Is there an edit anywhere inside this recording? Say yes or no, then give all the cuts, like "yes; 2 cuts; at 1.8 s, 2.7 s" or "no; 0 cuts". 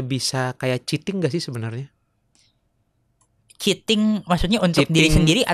no; 0 cuts